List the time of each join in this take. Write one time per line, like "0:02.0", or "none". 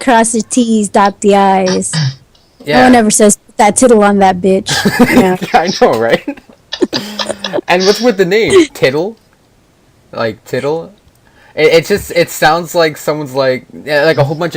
0:04.3